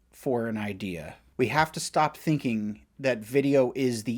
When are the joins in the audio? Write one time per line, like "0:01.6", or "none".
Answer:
0:01.2